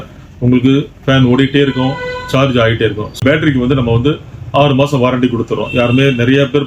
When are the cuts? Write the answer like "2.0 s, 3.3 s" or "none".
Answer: 3.2 s